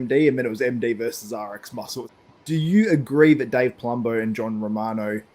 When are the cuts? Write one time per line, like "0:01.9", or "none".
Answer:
0:02.1